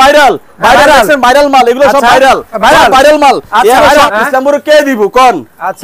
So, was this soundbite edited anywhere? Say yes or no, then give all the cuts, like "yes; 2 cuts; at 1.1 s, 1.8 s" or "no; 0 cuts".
yes; 1 cut; at 4.1 s